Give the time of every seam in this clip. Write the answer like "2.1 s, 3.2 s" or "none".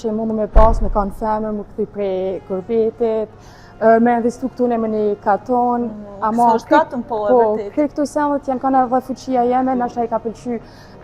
none